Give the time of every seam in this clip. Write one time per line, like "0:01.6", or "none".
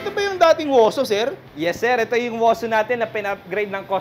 none